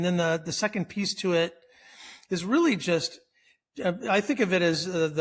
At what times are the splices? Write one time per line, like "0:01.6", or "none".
none